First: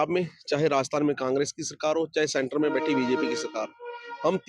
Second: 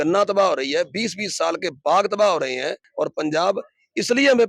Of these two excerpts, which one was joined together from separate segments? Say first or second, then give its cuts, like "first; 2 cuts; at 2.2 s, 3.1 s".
second; 1 cut; at 2.8 s